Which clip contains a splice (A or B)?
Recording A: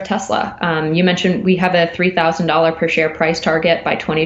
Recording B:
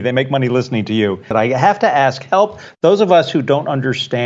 B